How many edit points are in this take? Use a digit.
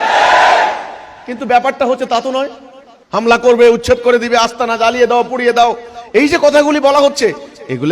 0